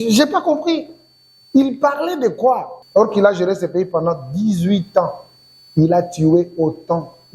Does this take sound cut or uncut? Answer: cut